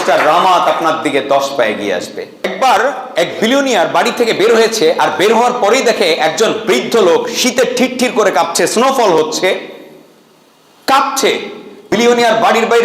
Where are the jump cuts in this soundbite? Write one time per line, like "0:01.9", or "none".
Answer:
0:02.5
0:11.9